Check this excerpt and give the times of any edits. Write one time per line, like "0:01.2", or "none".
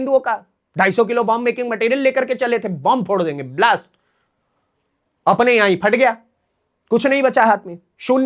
none